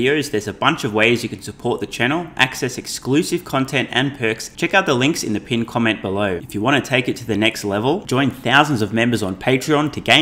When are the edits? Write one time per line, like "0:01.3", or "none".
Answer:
0:04.5
0:06.4